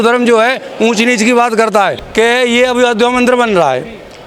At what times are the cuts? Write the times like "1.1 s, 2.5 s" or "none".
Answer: 2.0 s